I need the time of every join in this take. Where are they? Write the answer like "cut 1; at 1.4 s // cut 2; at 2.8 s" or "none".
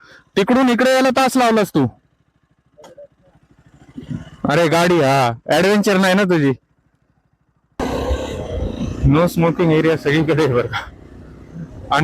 cut 1; at 7.8 s